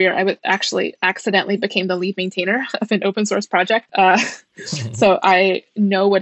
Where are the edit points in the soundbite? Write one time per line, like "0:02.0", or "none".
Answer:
0:03.9